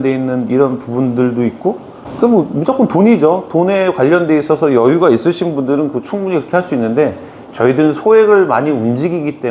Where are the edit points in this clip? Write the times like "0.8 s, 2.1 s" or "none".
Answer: none